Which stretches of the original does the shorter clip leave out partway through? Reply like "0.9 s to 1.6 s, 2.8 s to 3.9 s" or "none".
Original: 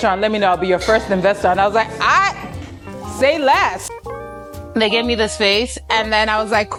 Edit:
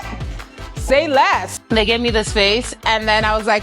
3.9 s to 4.6 s

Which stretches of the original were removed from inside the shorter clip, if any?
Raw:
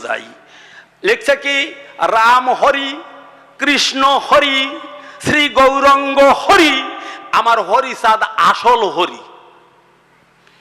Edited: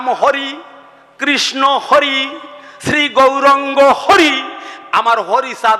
none

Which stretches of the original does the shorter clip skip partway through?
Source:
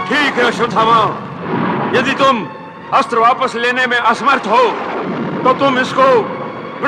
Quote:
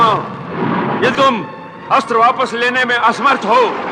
2.1 s to 2.2 s

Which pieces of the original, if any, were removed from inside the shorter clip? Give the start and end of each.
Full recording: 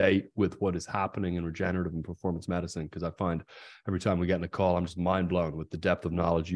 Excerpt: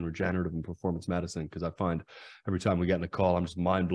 none

